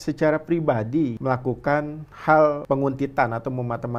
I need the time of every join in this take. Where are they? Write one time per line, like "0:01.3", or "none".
0:01.2
0:02.6